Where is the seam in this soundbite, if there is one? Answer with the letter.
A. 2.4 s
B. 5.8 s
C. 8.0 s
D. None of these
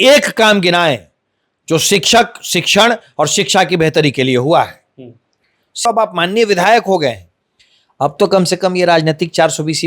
B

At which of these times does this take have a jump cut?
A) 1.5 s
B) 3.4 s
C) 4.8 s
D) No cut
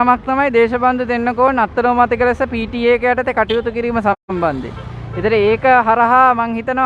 D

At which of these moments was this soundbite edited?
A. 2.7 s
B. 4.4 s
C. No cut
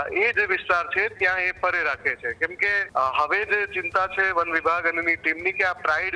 A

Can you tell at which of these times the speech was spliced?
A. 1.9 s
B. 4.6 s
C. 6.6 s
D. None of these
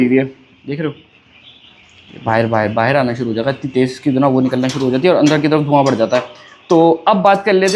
D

